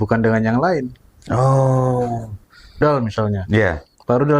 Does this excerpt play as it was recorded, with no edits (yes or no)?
no